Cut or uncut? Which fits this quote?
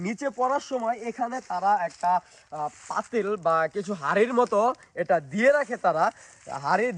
uncut